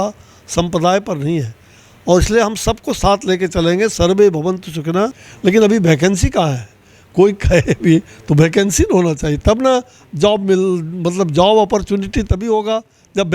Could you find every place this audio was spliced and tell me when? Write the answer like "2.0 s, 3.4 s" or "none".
5.2 s